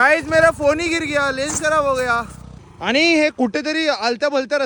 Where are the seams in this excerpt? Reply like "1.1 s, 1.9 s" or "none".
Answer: none